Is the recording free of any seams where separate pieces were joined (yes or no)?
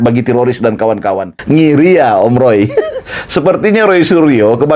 no